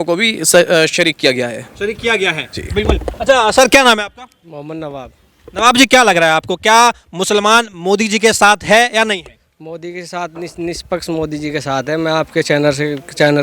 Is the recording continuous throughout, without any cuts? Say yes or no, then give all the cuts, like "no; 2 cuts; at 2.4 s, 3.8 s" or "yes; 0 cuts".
yes; 0 cuts